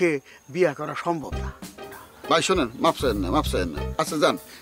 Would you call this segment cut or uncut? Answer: uncut